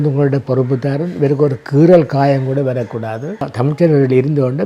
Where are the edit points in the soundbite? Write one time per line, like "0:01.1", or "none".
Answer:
0:03.5